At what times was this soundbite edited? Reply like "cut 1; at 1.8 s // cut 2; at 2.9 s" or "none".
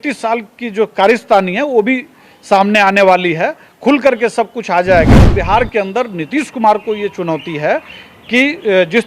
cut 1; at 5.4 s